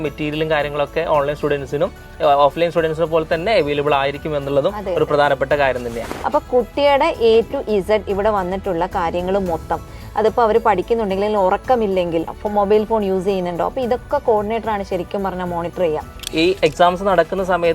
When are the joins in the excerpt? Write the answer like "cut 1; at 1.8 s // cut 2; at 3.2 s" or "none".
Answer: cut 1; at 6.1 s // cut 2; at 12.4 s // cut 3; at 16.2 s

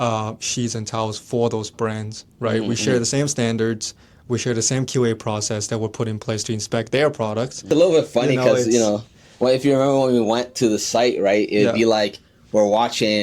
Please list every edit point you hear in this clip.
cut 1; at 7.7 s

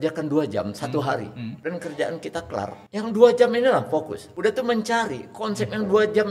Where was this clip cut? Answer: cut 1; at 1.5 s // cut 2; at 2.8 s // cut 3; at 4.2 s

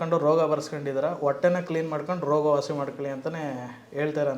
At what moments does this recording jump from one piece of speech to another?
none

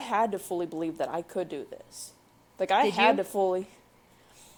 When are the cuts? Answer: none

